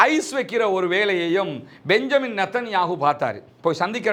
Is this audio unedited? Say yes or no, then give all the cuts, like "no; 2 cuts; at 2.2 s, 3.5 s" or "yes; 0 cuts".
yes; 0 cuts